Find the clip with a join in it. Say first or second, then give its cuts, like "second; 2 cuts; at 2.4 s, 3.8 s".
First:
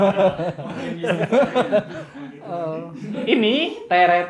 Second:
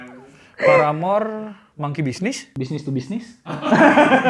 second; 1 cut; at 2.5 s